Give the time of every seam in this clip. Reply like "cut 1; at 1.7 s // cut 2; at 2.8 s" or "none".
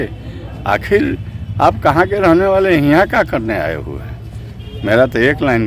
none